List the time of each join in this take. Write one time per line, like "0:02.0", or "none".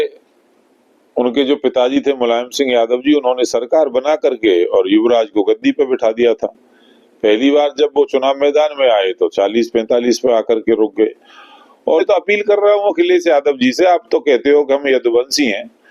0:12.0